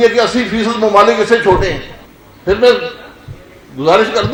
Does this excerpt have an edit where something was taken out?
no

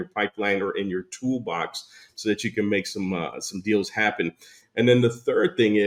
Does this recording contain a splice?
no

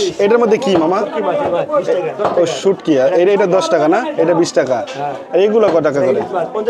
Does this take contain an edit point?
no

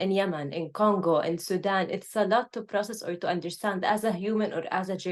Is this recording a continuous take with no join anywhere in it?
yes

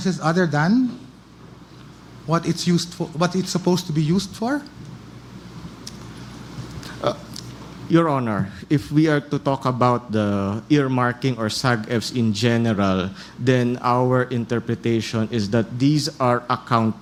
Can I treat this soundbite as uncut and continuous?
yes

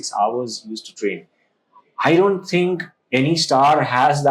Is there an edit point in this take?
no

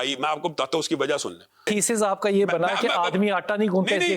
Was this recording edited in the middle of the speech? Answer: yes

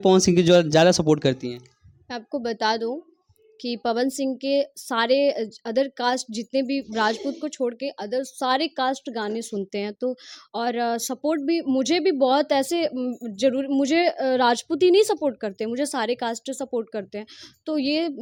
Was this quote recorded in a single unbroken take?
yes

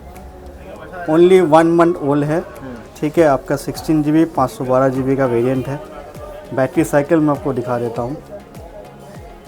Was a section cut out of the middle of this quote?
no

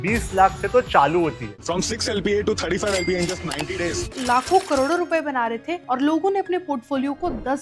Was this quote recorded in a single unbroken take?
no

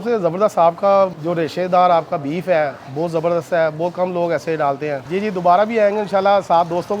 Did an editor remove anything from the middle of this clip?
yes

